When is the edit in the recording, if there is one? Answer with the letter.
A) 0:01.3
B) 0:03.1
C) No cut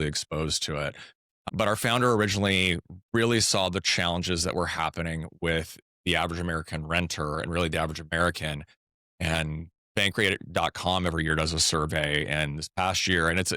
A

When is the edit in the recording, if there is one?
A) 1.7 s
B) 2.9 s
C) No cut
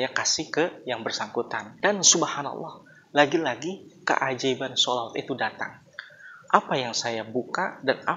A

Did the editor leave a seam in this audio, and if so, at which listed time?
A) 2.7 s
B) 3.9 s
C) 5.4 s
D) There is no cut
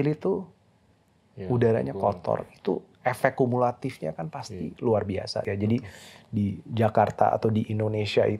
C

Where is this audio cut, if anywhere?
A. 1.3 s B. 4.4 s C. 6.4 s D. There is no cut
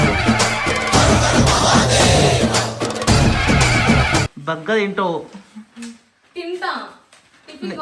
B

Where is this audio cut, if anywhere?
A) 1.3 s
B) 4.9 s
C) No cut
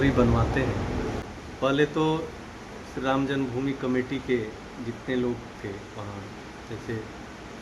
A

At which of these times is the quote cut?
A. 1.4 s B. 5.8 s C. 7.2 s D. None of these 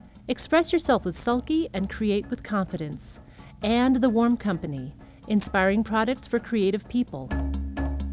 C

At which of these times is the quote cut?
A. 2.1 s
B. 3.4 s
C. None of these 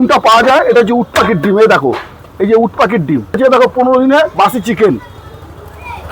B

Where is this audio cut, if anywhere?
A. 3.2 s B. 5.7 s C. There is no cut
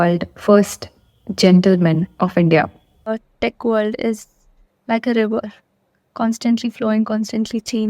A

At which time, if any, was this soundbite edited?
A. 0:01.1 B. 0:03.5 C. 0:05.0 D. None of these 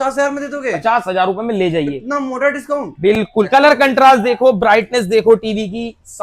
B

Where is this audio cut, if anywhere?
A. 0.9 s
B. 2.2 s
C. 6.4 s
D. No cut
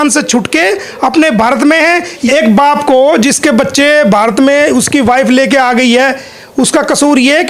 B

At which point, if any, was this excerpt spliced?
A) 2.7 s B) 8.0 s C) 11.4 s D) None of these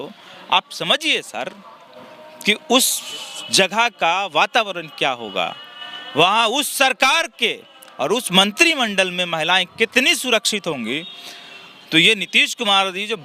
D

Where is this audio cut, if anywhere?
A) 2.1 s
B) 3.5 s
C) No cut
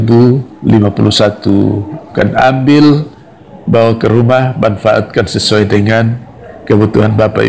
A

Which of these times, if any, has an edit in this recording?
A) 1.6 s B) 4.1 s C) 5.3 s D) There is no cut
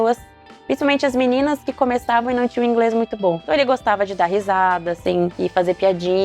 C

